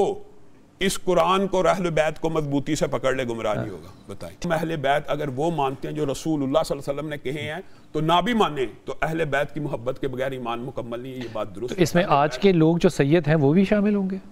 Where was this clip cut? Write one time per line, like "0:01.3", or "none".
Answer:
0:04.4